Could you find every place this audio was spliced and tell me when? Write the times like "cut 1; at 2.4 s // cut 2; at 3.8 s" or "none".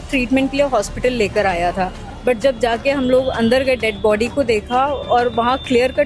cut 1; at 2.1 s

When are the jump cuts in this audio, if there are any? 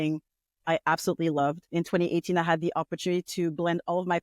cut 1; at 1.6 s

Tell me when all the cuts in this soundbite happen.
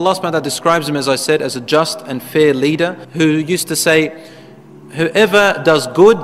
none

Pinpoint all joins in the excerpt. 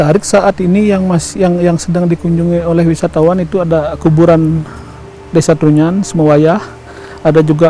none

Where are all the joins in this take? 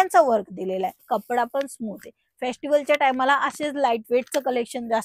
cut 1; at 1.0 s

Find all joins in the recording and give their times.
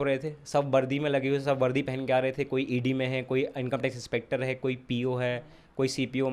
none

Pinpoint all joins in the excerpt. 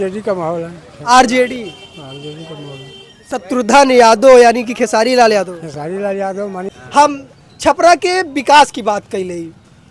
cut 1; at 6.8 s

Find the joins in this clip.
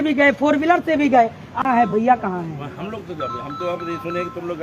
cut 1; at 1.6 s

